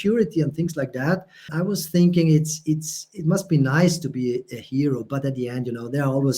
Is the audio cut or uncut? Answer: cut